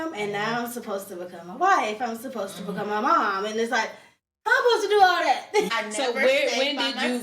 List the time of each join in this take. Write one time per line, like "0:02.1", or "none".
0:05.7